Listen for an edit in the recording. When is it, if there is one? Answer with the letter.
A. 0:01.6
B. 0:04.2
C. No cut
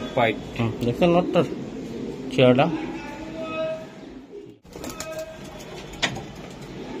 B